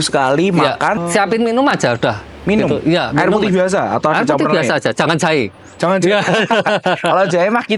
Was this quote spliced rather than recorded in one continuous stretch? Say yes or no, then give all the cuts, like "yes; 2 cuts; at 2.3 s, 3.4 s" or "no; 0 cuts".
yes; 1 cut; at 1.0 s